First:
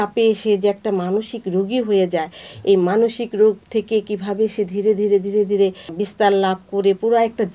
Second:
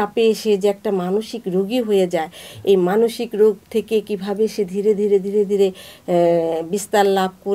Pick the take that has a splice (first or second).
first